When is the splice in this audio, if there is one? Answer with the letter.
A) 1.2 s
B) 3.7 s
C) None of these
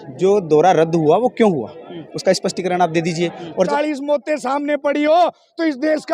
B